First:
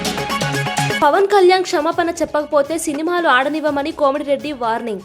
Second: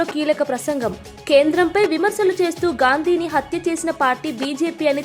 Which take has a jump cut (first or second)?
first